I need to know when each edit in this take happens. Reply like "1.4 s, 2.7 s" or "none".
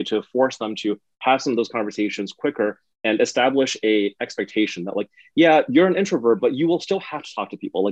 none